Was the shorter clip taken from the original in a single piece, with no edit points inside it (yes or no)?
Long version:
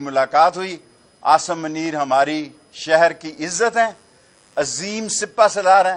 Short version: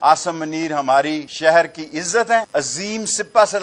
no